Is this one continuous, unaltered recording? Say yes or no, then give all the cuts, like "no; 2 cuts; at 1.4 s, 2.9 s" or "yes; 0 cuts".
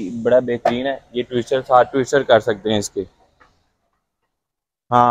yes; 0 cuts